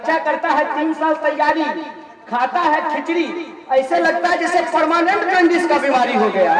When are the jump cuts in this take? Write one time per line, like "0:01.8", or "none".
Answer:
none